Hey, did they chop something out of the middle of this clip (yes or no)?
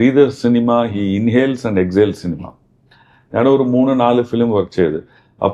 no